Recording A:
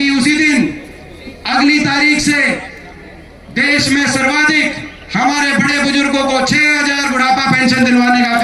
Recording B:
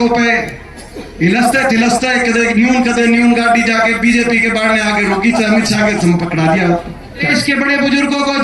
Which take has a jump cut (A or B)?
B